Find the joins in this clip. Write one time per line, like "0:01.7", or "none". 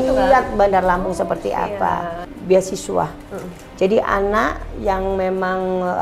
0:02.3